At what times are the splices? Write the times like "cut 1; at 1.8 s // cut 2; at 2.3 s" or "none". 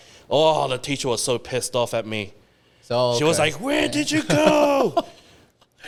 none